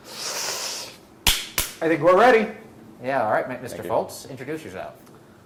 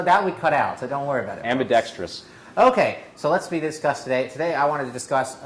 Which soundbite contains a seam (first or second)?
second